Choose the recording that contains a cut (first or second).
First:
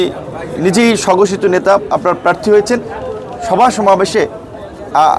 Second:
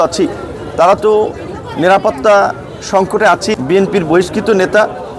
second